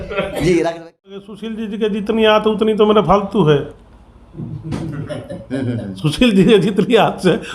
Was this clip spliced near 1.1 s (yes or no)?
yes